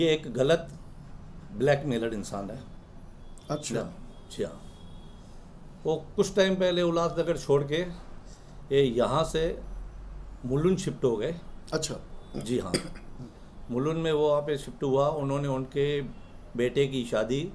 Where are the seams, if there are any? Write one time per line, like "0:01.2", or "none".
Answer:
none